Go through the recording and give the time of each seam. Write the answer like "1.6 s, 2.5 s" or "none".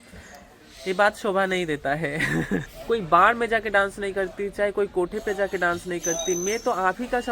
2.7 s